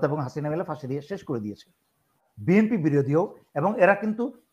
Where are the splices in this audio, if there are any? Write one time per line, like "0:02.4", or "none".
0:02.3